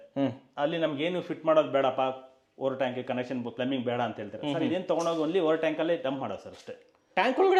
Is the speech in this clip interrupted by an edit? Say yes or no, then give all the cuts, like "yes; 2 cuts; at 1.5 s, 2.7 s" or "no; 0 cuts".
no; 0 cuts